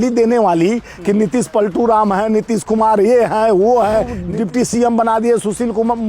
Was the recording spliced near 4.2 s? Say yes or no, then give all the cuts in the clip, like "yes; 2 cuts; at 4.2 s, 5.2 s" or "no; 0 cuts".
yes; 1 cut; at 4.2 s